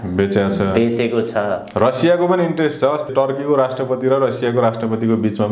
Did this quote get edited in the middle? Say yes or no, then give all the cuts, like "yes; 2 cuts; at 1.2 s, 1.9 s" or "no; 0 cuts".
yes; 1 cut; at 3.1 s